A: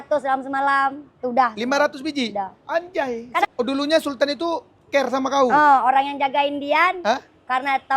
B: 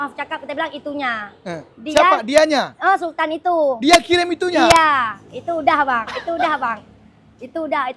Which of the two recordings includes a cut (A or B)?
A